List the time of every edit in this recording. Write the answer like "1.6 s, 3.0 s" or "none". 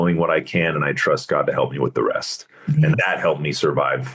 3.0 s